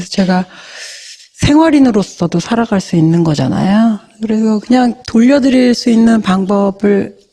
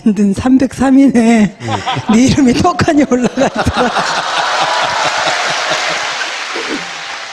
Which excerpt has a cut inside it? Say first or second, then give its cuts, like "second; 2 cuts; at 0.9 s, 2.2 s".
first; 1 cut; at 6.0 s